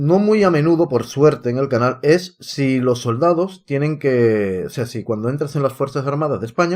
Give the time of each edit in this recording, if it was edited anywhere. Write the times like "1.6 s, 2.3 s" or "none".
none